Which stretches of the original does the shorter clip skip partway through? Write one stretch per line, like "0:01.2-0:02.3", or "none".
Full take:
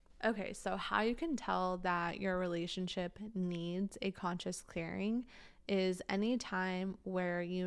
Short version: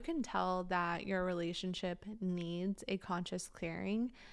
none